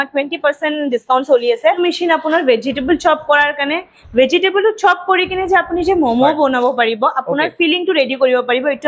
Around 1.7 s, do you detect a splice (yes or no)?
yes